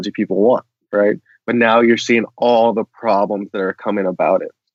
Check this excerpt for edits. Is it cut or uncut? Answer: uncut